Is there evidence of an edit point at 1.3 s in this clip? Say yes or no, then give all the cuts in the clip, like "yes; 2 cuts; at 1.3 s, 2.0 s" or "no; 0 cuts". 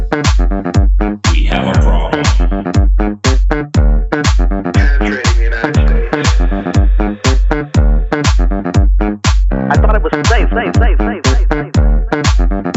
yes; 1 cut; at 1.3 s